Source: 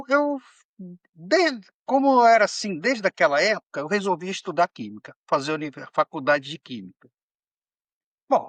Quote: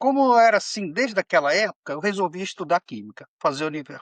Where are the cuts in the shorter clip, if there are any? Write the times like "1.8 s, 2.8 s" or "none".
none